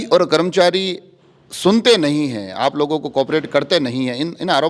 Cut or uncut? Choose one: uncut